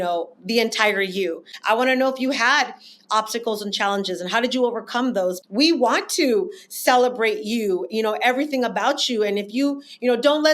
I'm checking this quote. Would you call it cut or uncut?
cut